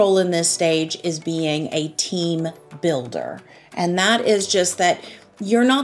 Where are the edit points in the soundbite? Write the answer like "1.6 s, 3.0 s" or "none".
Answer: none